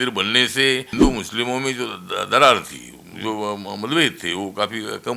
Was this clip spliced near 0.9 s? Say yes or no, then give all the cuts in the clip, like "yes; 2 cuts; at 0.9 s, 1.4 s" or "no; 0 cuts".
yes; 1 cut; at 0.9 s